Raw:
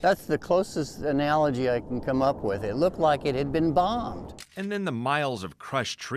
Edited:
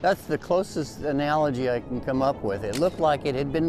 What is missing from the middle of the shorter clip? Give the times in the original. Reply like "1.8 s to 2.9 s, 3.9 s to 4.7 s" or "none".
none